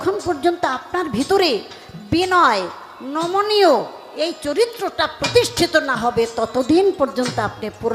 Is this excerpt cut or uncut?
uncut